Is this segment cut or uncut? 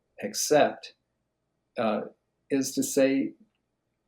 uncut